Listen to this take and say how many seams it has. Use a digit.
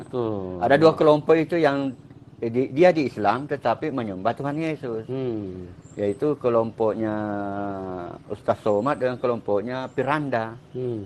0